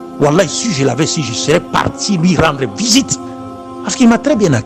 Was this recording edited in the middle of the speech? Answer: no; 0 cuts

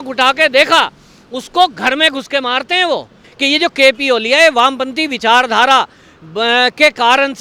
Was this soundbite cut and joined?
yes; 1 cut; at 3.3 s

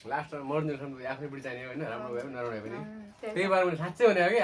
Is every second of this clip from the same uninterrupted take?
yes; 0 cuts

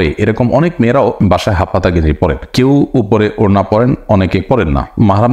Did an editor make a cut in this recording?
no; 0 cuts

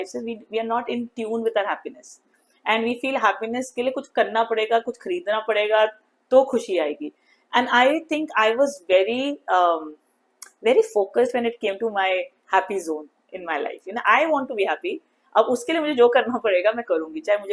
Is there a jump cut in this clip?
no; 0 cuts

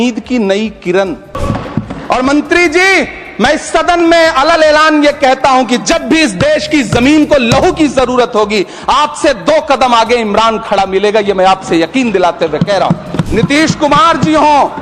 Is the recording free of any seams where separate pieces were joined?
no; 2 cuts; at 1.4 s, 13.3 s

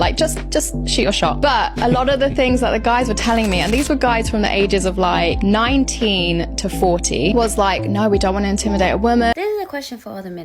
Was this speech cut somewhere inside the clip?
yes; 1 cut; at 9.4 s

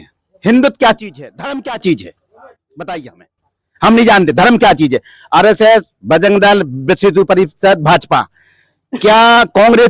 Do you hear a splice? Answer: no; 0 cuts

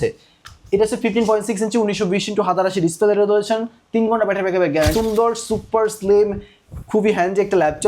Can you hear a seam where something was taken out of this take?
yes; 1 cut; at 4.9 s

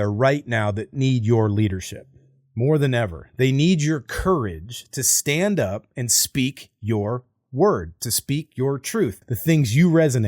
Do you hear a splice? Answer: yes; 1 cut; at 9.3 s

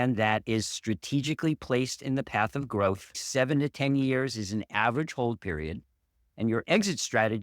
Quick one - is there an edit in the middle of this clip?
yes; 1 cut; at 3.2 s

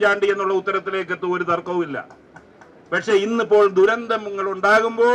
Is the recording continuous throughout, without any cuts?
yes; 0 cuts

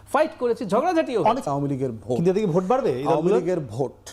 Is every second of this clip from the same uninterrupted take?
no; 1 cut; at 1.5 s

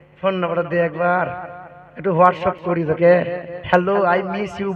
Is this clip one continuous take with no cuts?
yes; 0 cuts

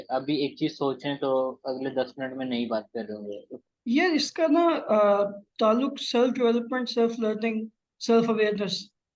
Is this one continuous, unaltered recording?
no; 1 cut; at 3.5 s

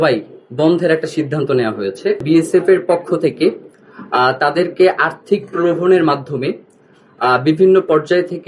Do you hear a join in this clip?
yes; 1 cut; at 2.2 s

